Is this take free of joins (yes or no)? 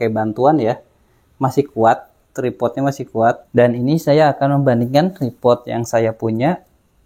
no